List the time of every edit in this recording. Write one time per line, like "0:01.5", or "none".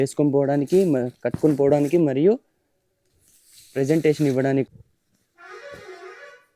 0:04.7